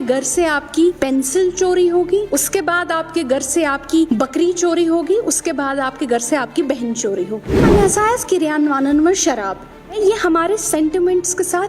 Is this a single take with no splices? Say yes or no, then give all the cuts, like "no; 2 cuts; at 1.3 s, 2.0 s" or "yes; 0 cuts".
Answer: no; 5 cuts; at 1.0 s, 2.3 s, 4.1 s, 7.6 s, 10.0 s